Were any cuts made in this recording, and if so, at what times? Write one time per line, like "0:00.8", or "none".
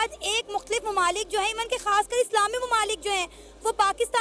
none